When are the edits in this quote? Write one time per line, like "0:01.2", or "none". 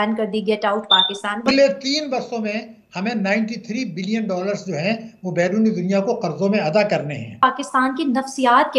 0:01.5
0:07.4